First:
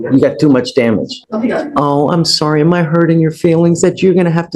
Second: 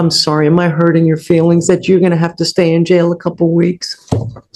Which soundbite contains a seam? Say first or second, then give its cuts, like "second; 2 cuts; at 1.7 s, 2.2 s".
first; 1 cut; at 1.2 s